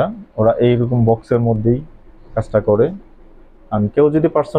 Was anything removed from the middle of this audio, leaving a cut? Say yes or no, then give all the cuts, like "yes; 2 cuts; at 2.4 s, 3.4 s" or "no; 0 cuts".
no; 0 cuts